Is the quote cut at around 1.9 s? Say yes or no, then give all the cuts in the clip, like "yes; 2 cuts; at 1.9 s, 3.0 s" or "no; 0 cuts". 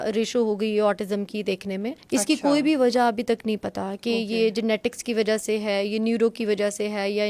yes; 1 cut; at 1.9 s